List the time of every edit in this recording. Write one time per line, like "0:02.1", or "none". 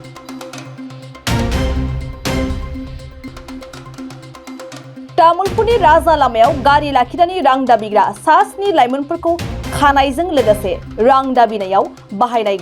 0:03.3
0:05.1

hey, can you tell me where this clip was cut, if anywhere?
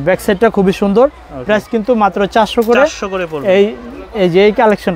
none

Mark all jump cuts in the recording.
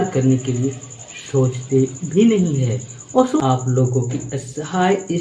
0:03.4

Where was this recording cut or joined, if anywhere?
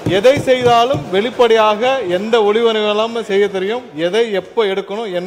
none

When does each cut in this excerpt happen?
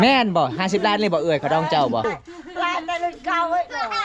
0:02.0

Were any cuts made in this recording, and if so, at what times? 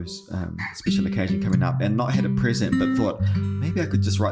none

